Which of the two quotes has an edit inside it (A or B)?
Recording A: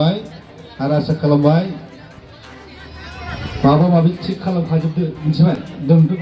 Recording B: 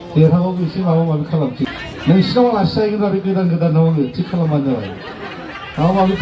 B